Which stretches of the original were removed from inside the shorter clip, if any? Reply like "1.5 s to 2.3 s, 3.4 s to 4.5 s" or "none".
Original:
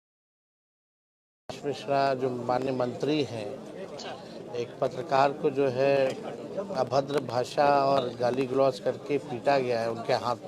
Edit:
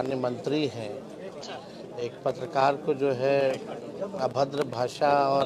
none